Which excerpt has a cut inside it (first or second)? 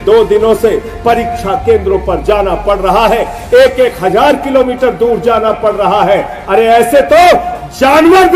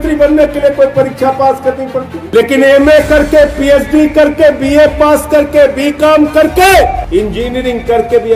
second